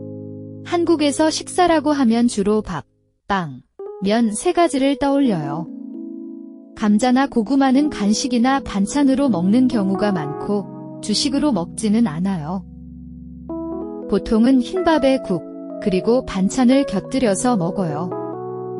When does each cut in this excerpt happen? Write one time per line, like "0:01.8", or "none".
0:12.5
0:14.1